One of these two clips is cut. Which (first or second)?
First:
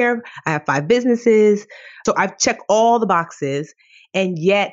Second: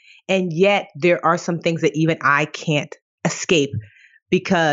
first